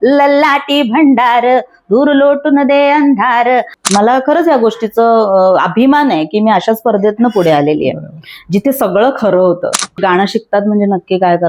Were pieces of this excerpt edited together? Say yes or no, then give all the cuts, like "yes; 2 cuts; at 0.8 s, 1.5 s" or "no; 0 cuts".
yes; 2 cuts; at 3.7 s, 10.0 s